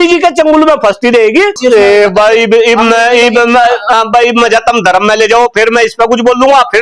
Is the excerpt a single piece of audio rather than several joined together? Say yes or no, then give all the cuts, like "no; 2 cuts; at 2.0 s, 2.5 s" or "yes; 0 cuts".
no; 1 cut; at 1.6 s